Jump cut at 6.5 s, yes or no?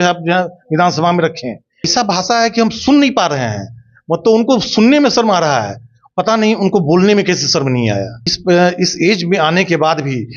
no